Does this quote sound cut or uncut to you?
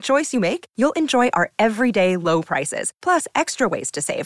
uncut